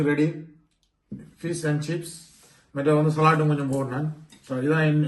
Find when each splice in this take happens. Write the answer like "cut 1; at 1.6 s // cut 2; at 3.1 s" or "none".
none